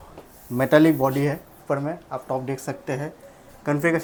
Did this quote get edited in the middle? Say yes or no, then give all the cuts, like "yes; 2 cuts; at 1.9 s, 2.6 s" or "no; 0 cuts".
no; 0 cuts